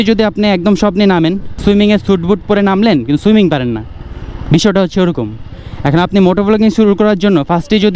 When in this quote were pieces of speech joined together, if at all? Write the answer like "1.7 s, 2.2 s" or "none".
1.6 s